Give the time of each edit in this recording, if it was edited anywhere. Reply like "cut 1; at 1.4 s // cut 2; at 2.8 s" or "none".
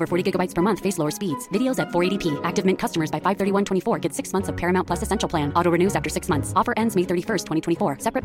none